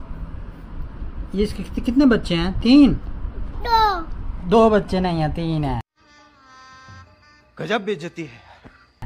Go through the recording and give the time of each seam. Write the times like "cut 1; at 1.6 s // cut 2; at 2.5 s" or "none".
none